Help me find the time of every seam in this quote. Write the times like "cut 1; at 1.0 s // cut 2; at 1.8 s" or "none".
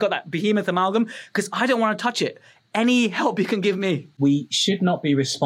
cut 1; at 4.2 s

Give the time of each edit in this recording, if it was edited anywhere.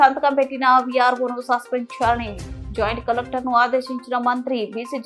none

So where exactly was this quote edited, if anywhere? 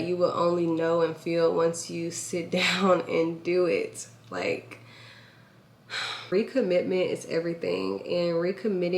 cut 1; at 6.3 s

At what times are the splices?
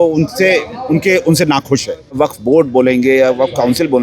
cut 1; at 2.2 s

